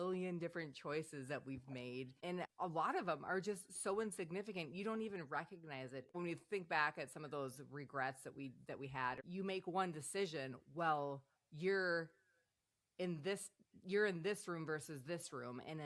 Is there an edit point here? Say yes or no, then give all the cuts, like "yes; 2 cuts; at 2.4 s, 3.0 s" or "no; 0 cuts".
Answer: yes; 3 cuts; at 2.2 s, 6.1 s, 9.2 s